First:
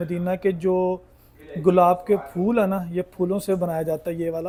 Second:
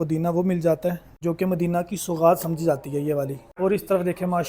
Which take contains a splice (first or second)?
second